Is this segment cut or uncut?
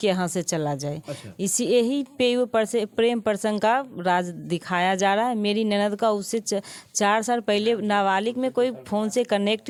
uncut